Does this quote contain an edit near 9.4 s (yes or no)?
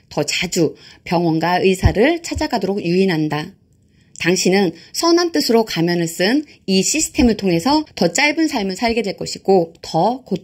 no